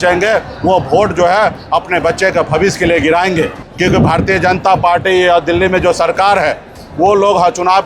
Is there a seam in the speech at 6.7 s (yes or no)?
no